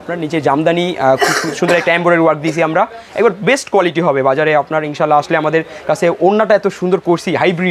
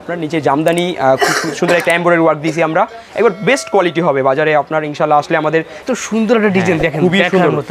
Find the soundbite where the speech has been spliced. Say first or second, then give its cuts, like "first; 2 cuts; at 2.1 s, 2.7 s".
second; 1 cut; at 5.8 s